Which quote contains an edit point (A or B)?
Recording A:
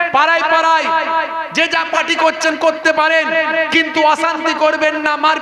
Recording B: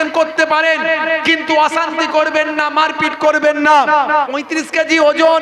B